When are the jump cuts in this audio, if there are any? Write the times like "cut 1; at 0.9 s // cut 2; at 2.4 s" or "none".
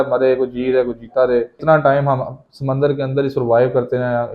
cut 1; at 1.6 s